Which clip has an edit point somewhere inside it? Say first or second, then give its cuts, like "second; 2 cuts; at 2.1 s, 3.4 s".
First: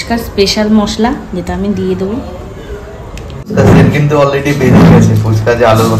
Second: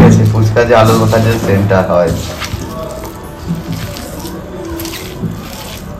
first; 1 cut; at 3.5 s